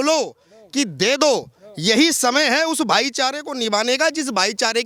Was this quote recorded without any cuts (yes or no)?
yes